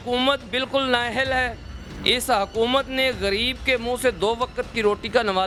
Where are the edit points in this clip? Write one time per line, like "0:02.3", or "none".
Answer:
none